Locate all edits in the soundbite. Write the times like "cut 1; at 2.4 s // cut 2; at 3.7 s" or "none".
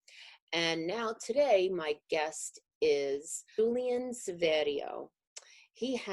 cut 1; at 3.6 s